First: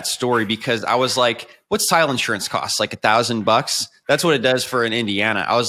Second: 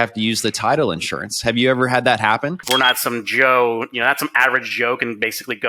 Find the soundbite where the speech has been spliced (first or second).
second